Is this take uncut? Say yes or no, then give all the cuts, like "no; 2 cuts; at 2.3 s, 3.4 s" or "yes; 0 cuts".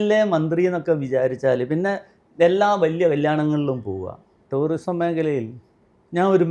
no; 1 cut; at 4.3 s